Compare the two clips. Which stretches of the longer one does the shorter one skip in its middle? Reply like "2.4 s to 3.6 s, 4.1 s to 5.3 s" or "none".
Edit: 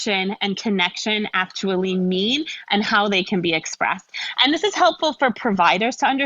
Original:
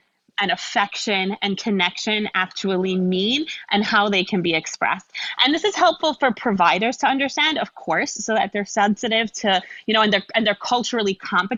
none